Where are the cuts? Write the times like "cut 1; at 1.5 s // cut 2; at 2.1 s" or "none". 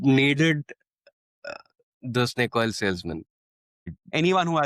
cut 1; at 3.6 s

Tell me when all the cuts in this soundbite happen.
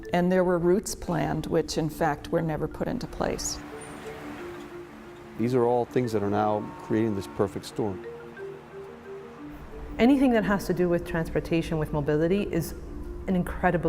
cut 1; at 6.1 s

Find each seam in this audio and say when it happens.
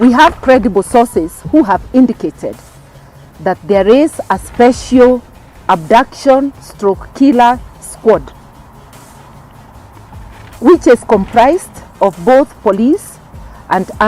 none

